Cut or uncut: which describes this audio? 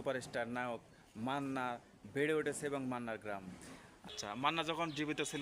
cut